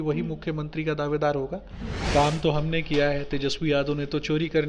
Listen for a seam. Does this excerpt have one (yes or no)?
yes